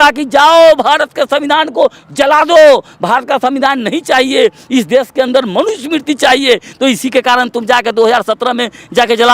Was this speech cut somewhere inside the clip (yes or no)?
no